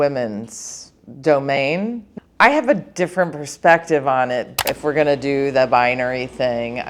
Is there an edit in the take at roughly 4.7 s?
yes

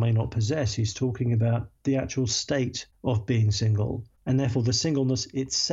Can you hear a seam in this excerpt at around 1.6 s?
no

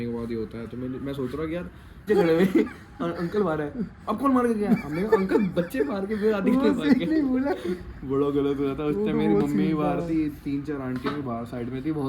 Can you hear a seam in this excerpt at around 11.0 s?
no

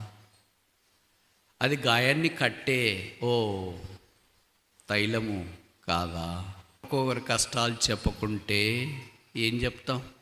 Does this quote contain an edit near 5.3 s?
no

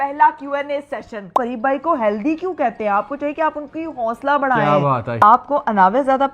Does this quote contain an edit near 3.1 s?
no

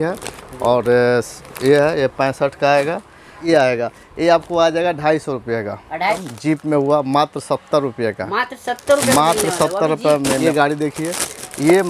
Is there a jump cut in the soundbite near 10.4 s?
yes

